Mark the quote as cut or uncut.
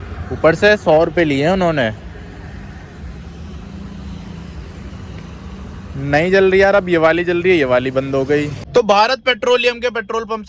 cut